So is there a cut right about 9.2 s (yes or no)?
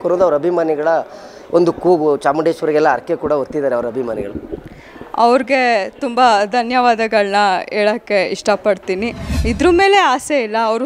yes